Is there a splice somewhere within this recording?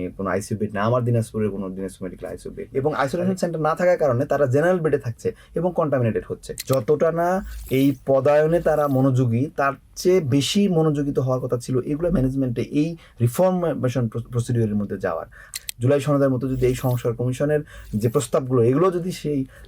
yes; 3 cuts; at 2.6 s, 6.5 s, 15.5 s

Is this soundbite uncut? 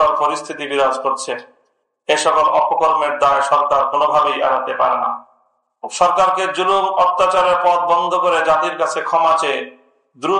yes; 0 cuts

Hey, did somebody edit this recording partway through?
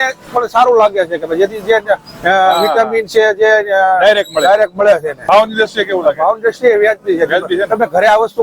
yes; 1 cut; at 5.1 s

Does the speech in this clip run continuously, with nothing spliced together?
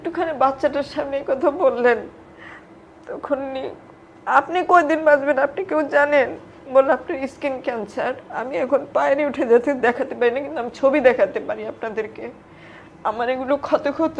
yes; 0 cuts

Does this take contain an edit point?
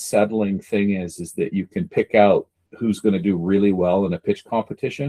no; 0 cuts

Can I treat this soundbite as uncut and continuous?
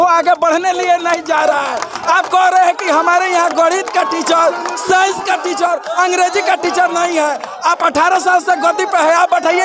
yes; 0 cuts

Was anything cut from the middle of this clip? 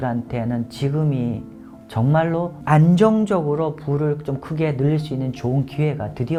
no; 0 cuts

